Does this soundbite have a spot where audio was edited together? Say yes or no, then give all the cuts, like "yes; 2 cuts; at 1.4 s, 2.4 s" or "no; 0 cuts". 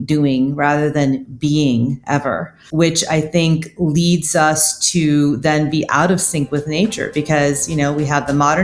yes; 1 cut; at 2.6 s